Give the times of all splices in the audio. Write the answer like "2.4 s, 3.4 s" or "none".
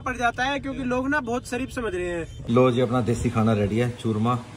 2.4 s